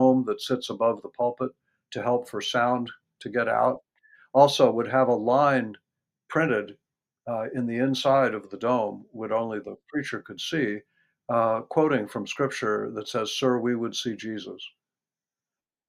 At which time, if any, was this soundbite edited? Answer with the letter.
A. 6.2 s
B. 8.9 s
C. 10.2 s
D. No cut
D